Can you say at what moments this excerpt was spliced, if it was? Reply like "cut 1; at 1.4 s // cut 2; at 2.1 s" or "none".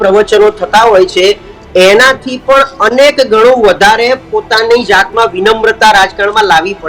none